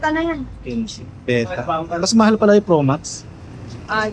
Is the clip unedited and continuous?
yes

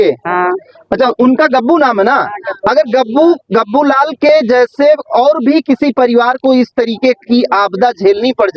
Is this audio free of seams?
yes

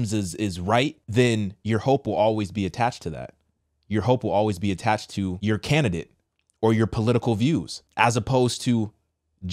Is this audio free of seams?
no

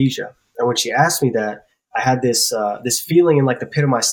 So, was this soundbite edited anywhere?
no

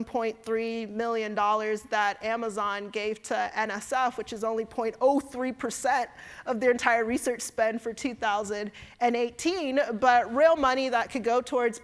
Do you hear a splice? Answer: no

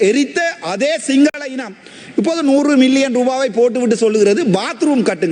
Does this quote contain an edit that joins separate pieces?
no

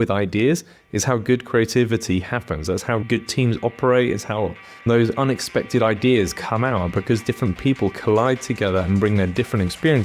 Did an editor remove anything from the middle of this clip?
yes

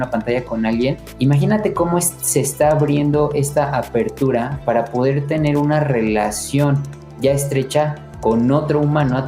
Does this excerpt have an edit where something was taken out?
yes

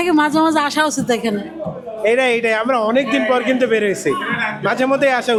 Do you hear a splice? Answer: no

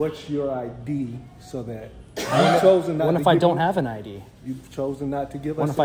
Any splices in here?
no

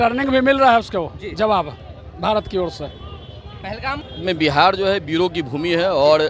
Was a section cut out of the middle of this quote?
yes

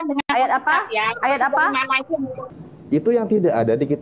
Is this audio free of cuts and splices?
no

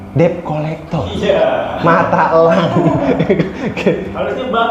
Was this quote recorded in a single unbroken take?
yes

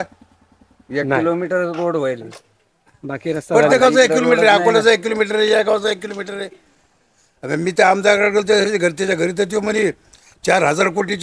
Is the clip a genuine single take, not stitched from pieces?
yes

